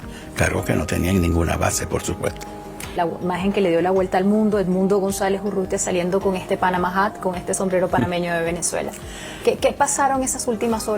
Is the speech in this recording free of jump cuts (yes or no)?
no